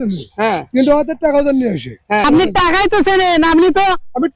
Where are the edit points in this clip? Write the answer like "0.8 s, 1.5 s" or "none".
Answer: 2.2 s